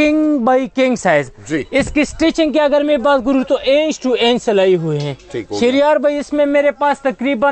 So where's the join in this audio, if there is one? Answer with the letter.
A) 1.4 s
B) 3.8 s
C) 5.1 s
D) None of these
D